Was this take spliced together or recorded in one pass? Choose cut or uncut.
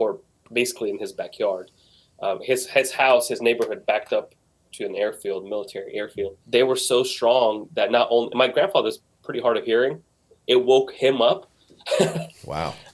cut